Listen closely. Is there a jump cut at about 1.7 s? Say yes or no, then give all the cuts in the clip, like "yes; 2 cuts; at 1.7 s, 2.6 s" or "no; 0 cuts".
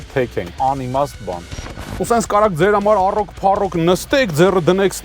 yes; 1 cut; at 1.7 s